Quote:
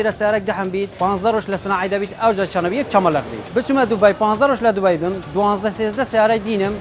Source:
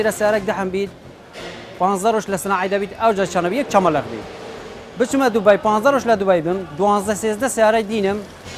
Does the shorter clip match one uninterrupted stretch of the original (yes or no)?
no